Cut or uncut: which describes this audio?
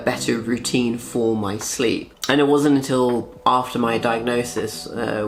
uncut